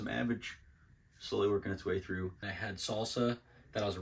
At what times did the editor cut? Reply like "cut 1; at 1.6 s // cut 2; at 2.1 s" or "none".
cut 1; at 2.5 s